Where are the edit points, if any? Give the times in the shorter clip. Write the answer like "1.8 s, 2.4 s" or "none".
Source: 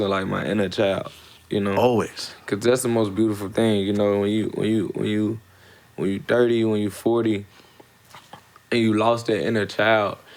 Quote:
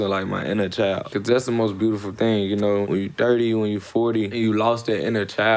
1.1 s, 2.8 s, 4.3 s